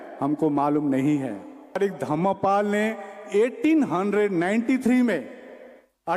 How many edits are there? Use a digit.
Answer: 1